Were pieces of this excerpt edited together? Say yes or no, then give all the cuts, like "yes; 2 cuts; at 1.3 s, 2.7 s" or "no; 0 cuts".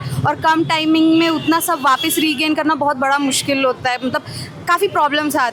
no; 0 cuts